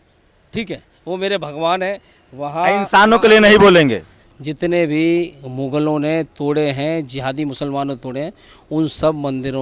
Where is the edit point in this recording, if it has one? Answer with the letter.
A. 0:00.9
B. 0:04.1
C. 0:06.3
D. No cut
B